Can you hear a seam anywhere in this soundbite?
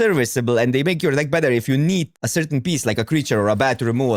yes; 1 cut; at 2.2 s

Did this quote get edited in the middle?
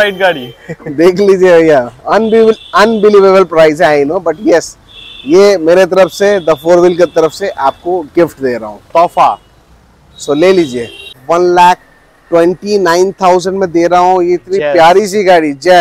yes; 1 cut; at 11.1 s

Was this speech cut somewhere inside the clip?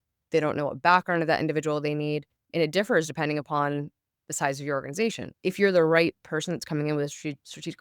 yes; 1 cut; at 5.3 s

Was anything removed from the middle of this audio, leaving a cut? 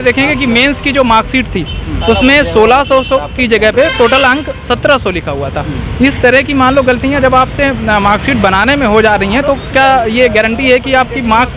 no; 0 cuts

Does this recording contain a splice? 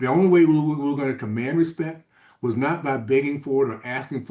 no; 0 cuts

